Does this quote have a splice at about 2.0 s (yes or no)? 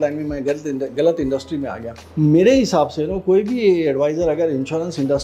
no